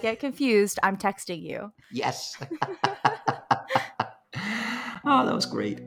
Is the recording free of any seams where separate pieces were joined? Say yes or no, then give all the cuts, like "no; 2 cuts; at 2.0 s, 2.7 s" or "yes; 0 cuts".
yes; 0 cuts